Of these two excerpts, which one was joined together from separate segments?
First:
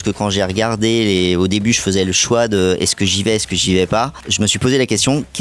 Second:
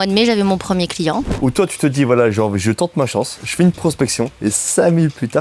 second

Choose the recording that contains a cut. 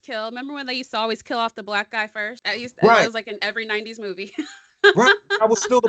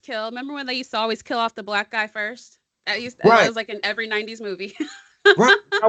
first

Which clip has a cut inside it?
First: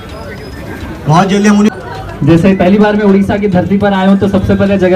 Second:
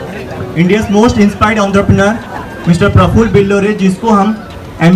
first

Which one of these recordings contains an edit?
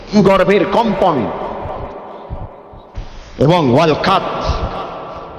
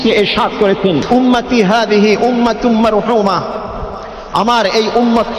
second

